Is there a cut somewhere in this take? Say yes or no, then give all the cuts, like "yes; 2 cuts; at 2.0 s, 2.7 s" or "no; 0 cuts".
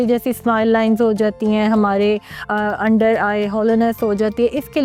no; 0 cuts